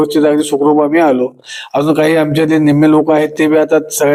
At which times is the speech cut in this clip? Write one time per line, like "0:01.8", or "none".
none